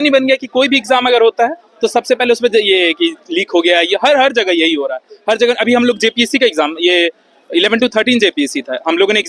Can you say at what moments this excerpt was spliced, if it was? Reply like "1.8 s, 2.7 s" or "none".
none